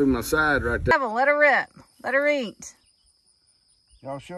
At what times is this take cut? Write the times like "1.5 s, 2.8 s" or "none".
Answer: 0.9 s